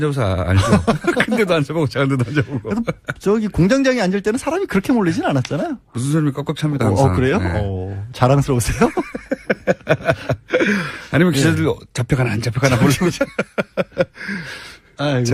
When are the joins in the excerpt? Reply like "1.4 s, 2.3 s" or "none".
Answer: 5.3 s